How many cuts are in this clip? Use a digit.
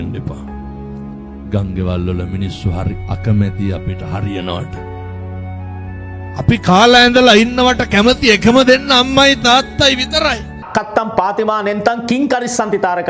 1